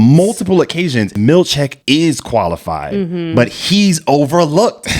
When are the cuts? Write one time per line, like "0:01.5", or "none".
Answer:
0:01.1